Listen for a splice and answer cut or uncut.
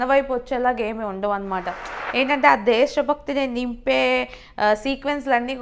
cut